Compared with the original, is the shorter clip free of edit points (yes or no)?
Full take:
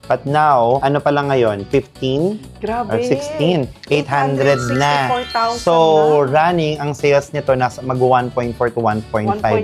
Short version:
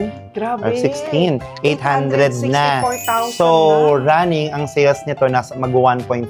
yes